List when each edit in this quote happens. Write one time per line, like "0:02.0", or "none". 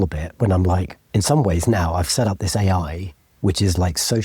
0:01.0